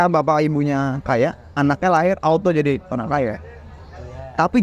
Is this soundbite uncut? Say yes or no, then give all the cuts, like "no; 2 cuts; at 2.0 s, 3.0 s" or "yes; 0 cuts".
yes; 0 cuts